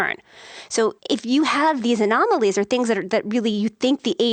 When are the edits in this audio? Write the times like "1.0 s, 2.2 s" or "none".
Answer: none